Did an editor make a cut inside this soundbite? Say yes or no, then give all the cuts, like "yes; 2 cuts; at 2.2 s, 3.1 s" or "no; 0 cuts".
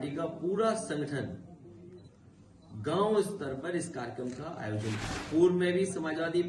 yes; 1 cut; at 5.2 s